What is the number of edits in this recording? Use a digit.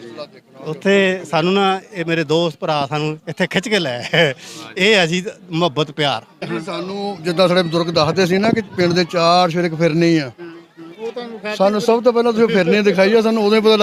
1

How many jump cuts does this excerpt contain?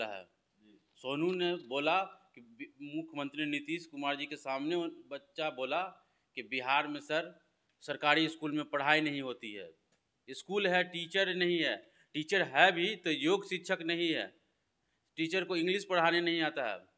0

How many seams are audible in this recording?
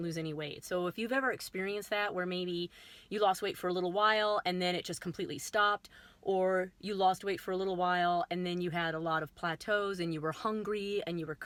0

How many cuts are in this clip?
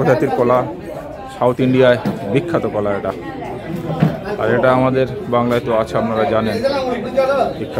0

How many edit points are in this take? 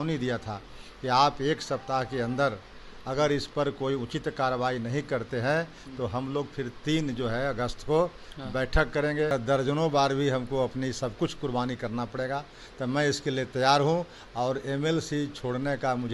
1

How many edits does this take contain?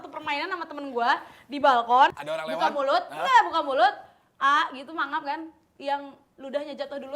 1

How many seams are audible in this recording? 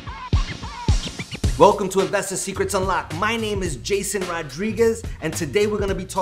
1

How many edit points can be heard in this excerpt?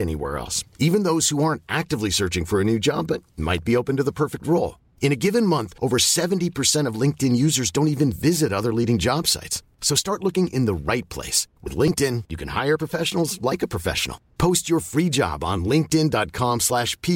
0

